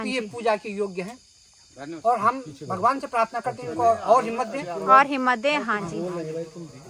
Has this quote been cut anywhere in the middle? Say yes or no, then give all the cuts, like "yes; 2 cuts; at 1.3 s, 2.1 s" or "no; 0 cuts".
no; 0 cuts